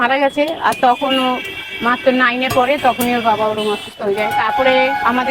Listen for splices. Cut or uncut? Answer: uncut